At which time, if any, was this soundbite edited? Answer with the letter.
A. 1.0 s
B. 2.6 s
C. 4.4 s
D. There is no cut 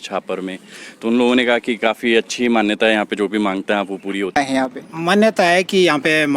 C